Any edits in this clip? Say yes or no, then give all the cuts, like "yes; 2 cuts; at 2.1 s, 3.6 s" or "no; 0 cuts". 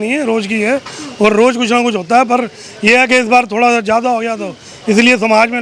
no; 0 cuts